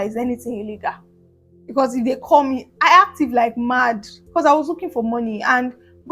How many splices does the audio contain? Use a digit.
0